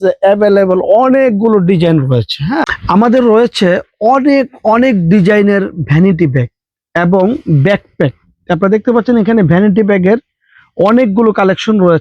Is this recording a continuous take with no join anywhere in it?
yes; 0 cuts

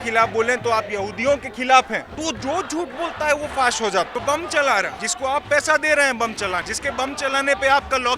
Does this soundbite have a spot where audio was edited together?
yes; 4 cuts; at 2.1 s, 4.1 s, 5.0 s, 6.7 s

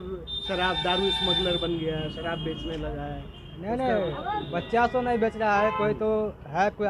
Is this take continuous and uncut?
yes; 0 cuts

